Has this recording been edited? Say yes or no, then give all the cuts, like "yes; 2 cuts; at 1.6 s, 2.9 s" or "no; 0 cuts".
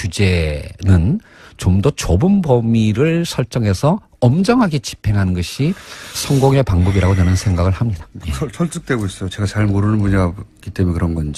no; 0 cuts